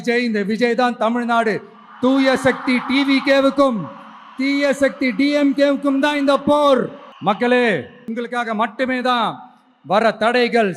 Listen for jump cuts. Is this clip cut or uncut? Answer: cut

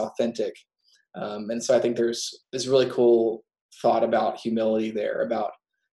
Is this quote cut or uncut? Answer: cut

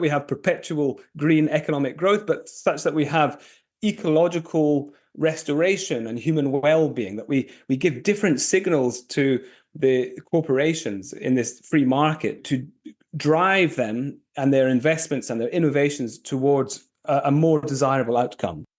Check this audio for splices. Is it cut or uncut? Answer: cut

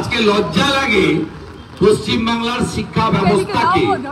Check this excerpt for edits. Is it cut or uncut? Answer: uncut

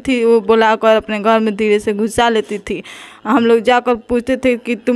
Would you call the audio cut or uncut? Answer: uncut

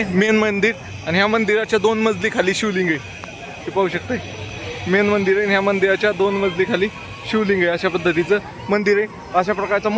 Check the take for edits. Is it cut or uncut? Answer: uncut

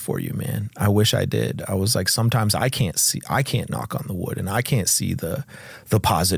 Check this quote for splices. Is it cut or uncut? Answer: uncut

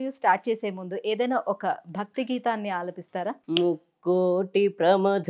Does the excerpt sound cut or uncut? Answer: cut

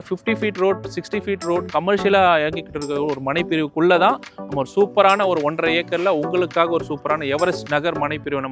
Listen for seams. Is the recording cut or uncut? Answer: uncut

